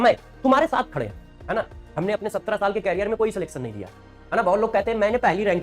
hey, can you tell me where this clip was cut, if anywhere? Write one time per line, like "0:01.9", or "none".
0:01.3